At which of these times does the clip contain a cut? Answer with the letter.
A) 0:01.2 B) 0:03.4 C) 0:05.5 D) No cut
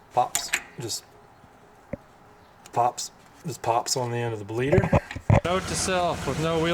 C